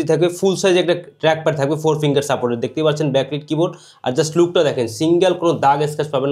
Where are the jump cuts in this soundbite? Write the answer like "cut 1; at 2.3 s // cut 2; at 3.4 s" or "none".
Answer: none